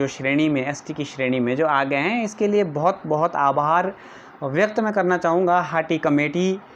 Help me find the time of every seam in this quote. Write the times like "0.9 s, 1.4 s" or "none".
none